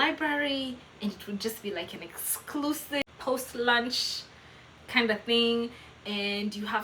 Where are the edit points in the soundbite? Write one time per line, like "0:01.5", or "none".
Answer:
0:03.0